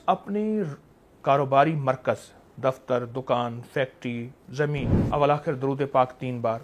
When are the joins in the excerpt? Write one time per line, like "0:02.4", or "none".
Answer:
0:04.9